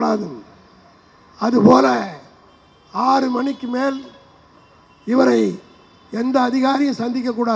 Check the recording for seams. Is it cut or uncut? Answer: uncut